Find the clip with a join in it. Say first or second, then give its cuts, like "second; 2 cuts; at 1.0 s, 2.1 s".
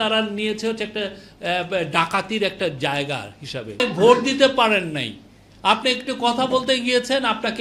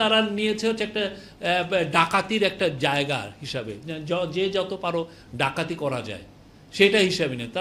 first; 1 cut; at 3.8 s